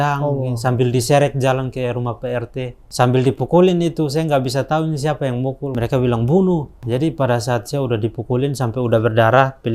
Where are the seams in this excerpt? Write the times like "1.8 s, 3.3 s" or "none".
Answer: 2.8 s, 5.7 s, 6.7 s